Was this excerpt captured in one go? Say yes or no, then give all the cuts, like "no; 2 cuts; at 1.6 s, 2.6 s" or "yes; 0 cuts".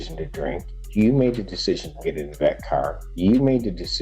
yes; 0 cuts